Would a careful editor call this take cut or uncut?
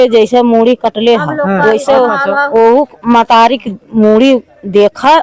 uncut